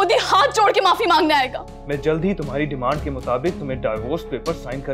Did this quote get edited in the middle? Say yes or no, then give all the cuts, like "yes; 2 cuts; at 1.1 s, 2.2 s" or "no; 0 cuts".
yes; 1 cut; at 1.7 s